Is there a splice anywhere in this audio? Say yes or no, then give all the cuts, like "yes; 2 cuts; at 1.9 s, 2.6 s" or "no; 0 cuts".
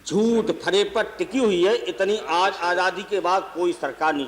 no; 0 cuts